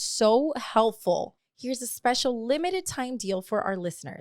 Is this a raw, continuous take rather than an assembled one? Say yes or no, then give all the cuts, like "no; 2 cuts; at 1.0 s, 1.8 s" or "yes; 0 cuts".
no; 1 cut; at 1.3 s